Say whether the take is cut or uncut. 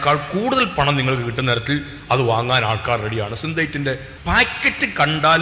cut